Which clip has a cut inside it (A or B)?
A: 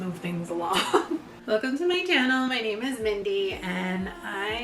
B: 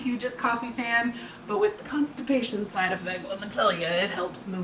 A